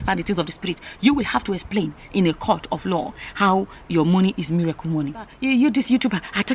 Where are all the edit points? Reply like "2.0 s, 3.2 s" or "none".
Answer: 5.4 s